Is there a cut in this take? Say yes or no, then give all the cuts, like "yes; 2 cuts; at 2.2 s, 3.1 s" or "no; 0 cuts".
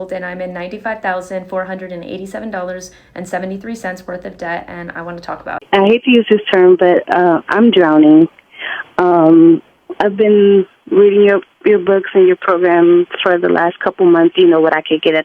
yes; 1 cut; at 5.6 s